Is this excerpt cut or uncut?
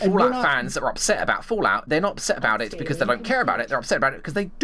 cut